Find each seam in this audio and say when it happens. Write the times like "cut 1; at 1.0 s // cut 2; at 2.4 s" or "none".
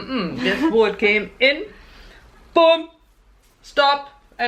none